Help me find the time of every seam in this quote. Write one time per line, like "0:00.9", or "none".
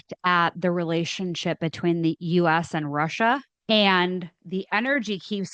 0:03.5